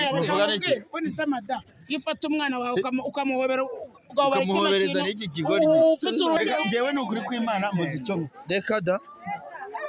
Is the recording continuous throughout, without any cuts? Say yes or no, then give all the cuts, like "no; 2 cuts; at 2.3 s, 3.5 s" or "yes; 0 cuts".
no; 1 cut; at 6.4 s